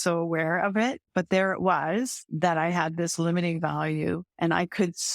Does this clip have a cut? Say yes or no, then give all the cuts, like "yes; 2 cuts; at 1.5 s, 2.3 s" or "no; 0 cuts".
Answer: yes; 2 cuts; at 1.0 s, 2.2 s